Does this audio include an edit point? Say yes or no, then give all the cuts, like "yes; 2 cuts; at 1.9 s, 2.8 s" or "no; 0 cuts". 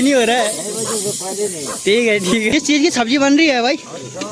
yes; 1 cut; at 2.5 s